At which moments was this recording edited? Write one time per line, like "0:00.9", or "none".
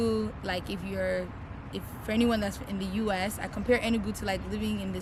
none

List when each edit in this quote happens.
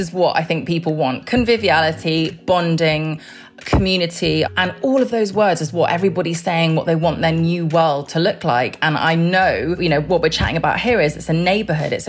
0:04.5
0:09.8

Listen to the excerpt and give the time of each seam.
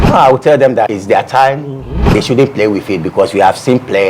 0:00.9
0:02.1

